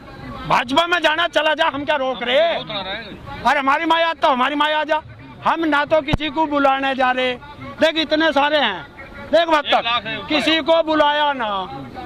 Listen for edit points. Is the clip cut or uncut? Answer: uncut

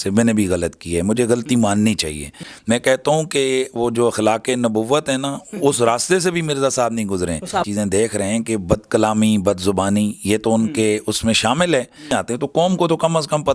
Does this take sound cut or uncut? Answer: cut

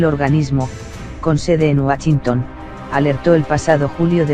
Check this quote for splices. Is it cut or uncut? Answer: cut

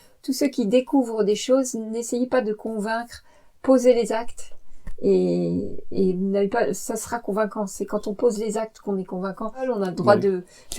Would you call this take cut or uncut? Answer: cut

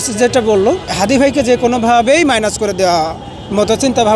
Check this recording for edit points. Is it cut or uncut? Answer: cut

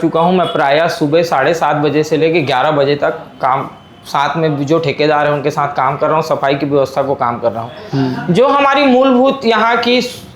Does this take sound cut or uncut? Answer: uncut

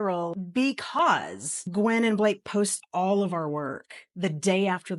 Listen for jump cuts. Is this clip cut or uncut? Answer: uncut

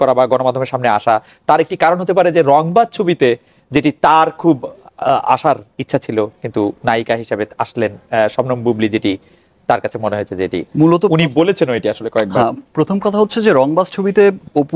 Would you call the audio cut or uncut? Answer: uncut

